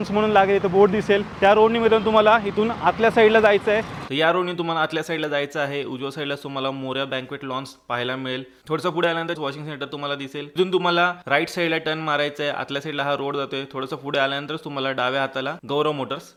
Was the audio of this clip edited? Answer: no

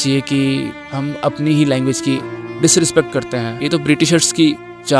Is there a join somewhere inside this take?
yes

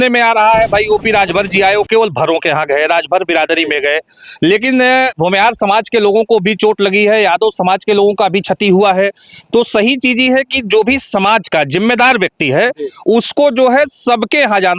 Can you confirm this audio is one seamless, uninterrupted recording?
yes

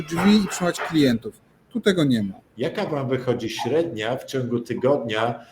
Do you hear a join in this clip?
yes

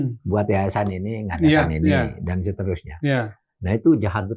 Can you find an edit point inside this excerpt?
no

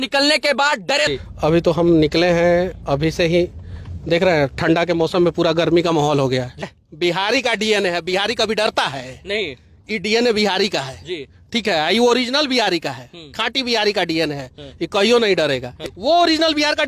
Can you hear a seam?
yes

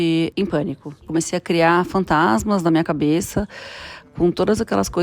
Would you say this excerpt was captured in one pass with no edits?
no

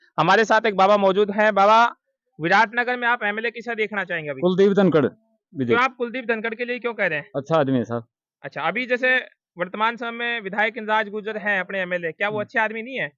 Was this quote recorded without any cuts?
yes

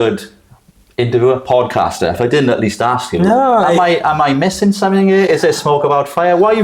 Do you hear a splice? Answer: no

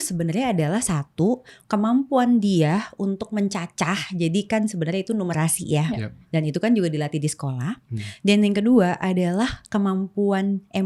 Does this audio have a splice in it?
no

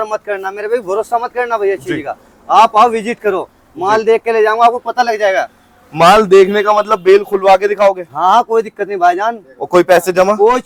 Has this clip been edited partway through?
no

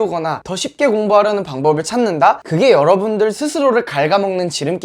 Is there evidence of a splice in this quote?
no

